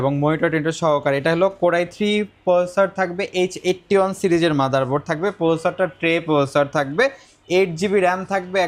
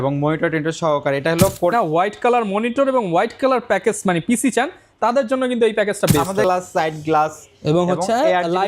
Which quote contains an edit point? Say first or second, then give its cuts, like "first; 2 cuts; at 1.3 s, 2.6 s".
second; 2 cuts; at 1.7 s, 6.4 s